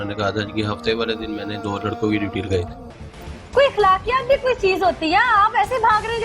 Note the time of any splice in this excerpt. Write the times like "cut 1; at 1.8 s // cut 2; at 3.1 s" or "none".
cut 1; at 2.8 s